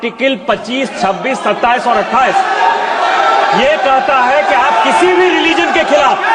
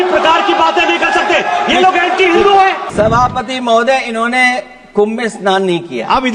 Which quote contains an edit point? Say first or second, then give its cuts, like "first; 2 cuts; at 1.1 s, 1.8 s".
second; 1 cut; at 2.8 s